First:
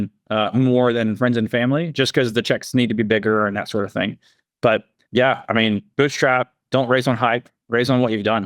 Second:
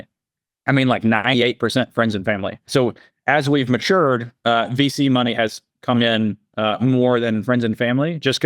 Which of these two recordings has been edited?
second; 1 cut; at 2.7 s

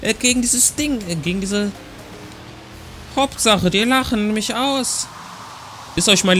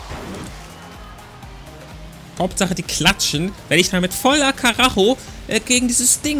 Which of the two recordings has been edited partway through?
second; 1 cut; at 2.2 s

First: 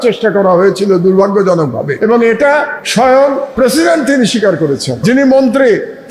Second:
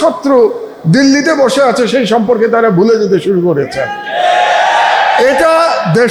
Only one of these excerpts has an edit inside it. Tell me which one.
first; 4 cuts; at 1.9 s, 2.8 s, 3.5 s, 5.0 s

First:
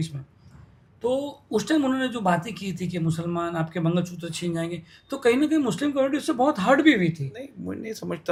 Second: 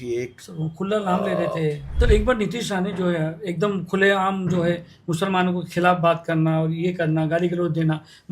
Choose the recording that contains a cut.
second; 1 cut; at 1.9 s

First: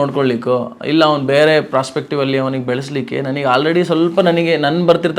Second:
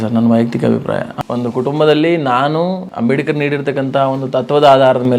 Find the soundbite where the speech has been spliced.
second; 2 cuts; at 1.1 s, 2.9 s

